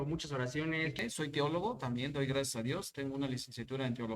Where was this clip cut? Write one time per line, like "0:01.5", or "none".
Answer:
0:01.0